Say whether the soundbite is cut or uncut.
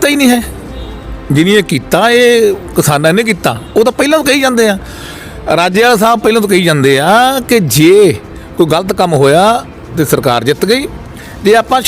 uncut